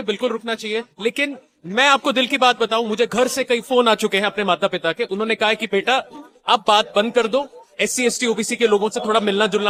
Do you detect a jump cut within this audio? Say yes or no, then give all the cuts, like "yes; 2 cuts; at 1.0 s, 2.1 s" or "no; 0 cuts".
no; 0 cuts